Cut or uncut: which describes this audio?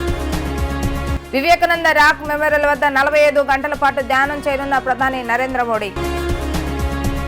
cut